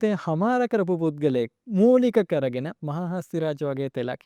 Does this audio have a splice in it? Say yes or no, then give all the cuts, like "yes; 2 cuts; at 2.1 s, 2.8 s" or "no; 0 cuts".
no; 0 cuts